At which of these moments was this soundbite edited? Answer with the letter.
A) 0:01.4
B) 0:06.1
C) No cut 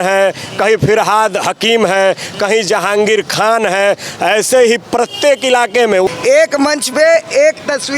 B